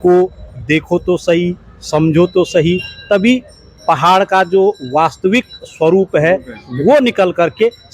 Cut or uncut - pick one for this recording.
uncut